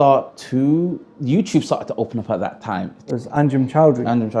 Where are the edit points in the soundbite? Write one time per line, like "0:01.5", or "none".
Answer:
0:03.1